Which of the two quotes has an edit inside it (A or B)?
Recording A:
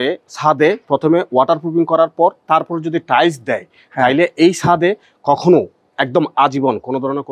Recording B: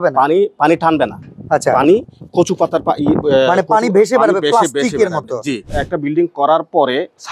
B